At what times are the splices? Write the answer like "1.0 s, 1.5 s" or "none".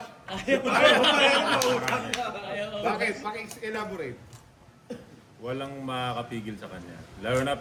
none